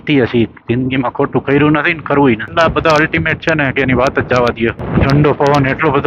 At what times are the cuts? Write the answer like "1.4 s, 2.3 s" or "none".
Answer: 2.5 s, 4.8 s